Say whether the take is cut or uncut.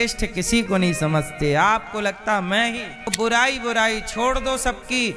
cut